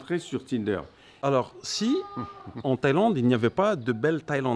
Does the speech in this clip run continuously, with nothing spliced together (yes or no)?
no